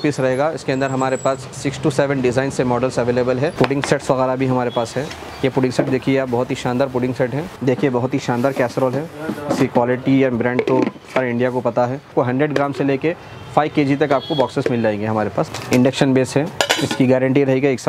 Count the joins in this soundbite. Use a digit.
4